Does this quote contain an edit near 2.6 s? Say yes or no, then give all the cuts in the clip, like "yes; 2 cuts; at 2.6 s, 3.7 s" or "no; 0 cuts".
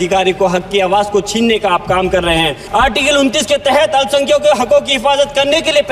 yes; 1 cut; at 2.6 s